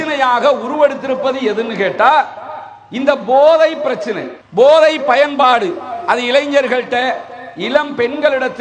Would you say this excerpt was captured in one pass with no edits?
yes; 0 cuts

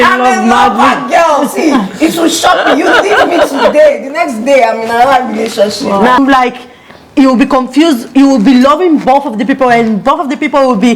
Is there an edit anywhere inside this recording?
yes; 1 cut; at 6.2 s

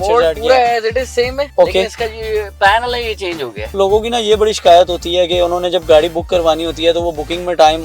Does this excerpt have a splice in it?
yes; 2 cuts; at 1.5 s, 3.7 s

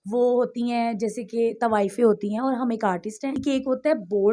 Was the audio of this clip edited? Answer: yes; 1 cut; at 3.4 s

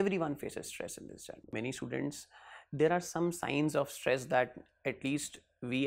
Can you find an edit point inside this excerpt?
yes; 1 cut; at 1.5 s

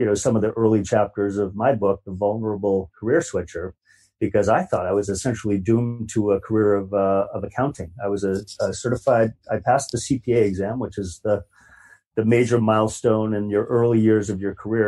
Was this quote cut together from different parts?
no; 0 cuts

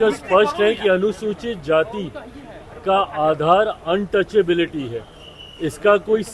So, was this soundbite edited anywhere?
no; 0 cuts

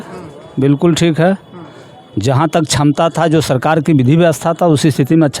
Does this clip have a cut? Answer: no; 0 cuts

